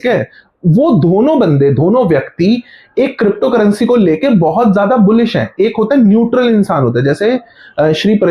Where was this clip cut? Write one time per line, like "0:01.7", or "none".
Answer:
none